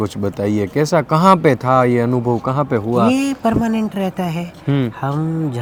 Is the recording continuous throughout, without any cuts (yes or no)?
yes